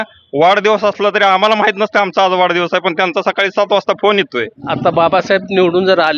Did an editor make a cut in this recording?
yes; 1 cut; at 4.6 s

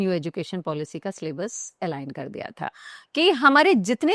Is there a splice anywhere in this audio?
yes; 1 cut; at 2.9 s

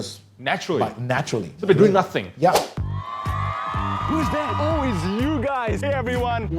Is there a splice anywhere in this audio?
yes; 1 cut; at 2.7 s

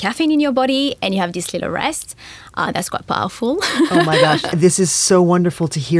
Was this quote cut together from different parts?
yes; 1 cut; at 4.5 s

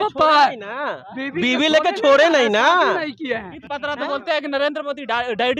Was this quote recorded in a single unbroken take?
no; 1 cut; at 3.6 s

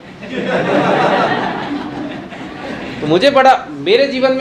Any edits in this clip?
no; 0 cuts

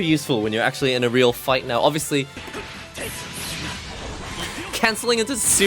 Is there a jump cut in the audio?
yes; 1 cut; at 2.4 s

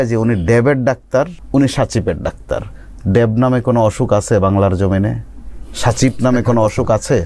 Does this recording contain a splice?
yes; 1 cut; at 1.4 s

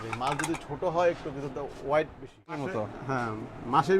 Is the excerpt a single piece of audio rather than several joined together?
no; 1 cut; at 2.8 s

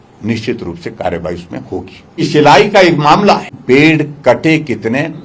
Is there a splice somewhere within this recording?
yes; 2 cuts; at 2.3 s, 3.6 s

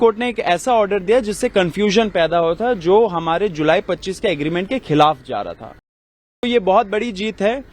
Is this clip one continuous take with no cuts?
no; 1 cut; at 6.4 s

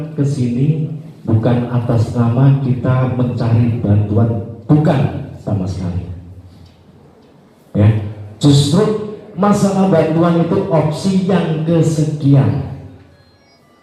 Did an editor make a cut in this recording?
no; 0 cuts

